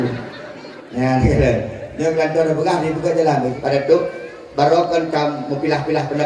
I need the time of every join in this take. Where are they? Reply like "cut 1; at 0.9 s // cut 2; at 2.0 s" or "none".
cut 1; at 3.6 s